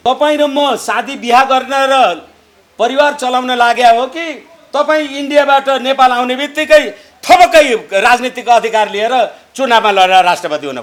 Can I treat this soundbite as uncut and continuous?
yes; 0 cuts

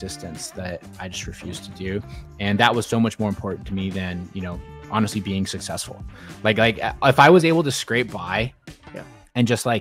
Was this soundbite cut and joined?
no; 0 cuts

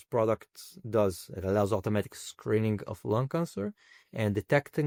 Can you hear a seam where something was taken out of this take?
no; 0 cuts

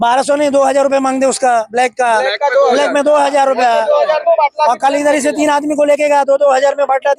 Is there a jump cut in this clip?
no; 0 cuts

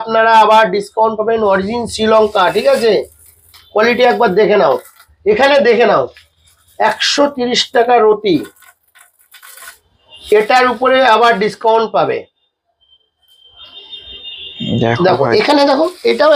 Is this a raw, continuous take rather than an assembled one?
yes; 0 cuts

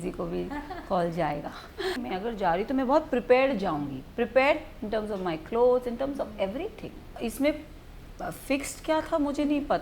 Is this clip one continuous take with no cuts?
no; 2 cuts; at 2.0 s, 7.0 s

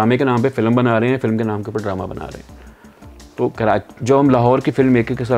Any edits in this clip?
no; 0 cuts

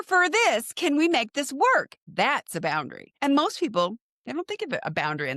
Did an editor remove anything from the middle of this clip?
yes; 2 cuts; at 2.0 s, 3.0 s

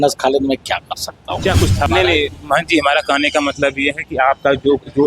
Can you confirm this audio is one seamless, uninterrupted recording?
no; 1 cut; at 1.9 s

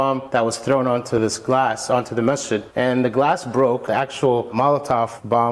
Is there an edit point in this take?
yes; 1 cut; at 4.2 s

